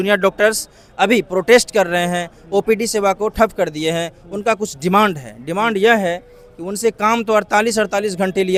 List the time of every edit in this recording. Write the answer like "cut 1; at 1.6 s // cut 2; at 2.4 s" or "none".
none